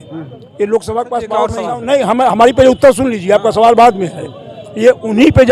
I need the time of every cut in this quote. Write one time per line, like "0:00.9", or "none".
0:01.7